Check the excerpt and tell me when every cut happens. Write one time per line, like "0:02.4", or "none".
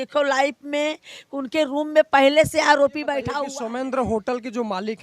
0:03.2